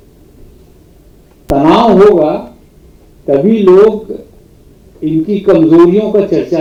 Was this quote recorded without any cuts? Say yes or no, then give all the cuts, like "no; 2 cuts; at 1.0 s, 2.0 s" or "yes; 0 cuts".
yes; 0 cuts